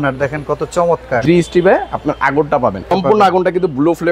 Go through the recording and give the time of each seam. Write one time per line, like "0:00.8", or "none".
0:01.2
0:02.9